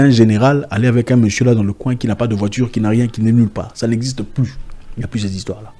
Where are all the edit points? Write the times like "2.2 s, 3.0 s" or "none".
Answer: none